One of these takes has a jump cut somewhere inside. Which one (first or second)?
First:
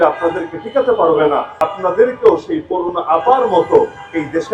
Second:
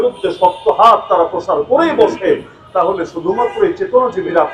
first